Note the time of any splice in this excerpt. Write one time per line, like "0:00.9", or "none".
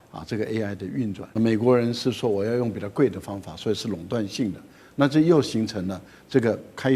0:01.2

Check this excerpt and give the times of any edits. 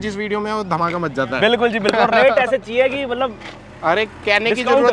none

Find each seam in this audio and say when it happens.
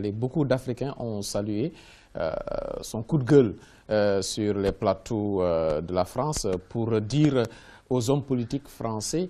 none

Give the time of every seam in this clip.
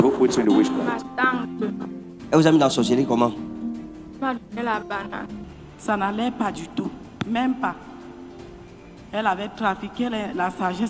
0:05.5

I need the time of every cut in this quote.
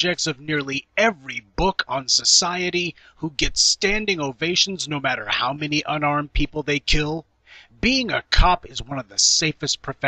0:06.2

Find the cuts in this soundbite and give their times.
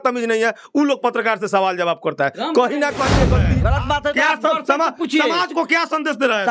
0:03.4

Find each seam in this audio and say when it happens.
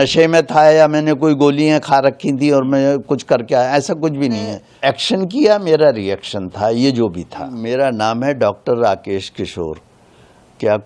0:04.6
0:07.6

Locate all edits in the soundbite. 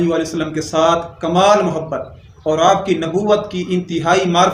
none

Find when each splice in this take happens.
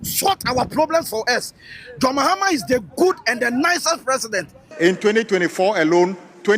0:04.6

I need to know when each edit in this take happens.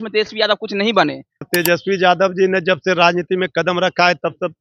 0:01.5

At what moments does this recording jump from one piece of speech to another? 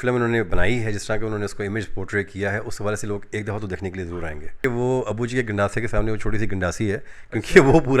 0:04.6

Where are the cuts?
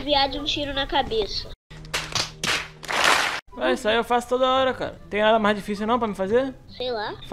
0:05.0

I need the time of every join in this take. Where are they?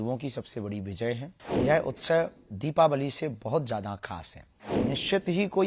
0:01.4
0:04.8

